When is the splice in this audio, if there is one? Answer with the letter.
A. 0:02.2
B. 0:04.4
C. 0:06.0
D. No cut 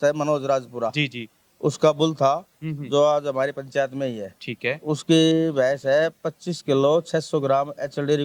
D